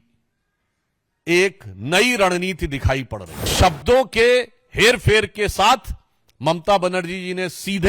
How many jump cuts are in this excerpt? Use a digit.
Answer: 1